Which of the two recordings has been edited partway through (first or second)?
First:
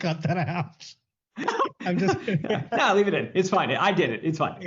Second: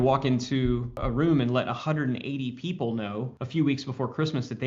second